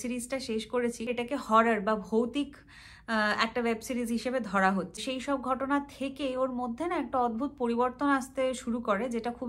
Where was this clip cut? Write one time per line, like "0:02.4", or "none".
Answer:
0:01.1
0:05.0